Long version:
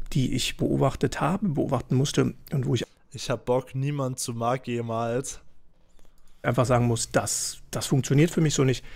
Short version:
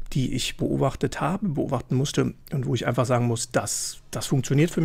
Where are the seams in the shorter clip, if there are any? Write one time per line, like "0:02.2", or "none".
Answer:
0:02.8